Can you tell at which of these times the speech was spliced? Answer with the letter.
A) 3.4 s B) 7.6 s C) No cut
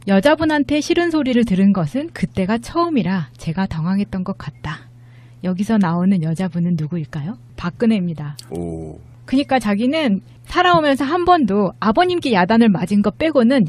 B